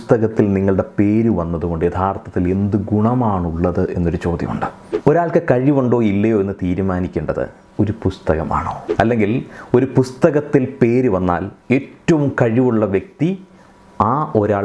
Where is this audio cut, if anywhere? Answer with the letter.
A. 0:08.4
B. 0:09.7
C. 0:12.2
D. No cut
D